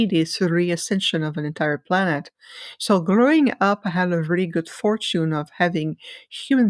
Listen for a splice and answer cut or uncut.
uncut